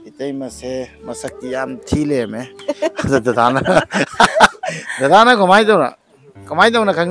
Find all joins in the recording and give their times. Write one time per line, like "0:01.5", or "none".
none